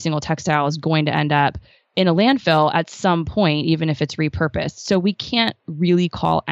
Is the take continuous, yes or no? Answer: yes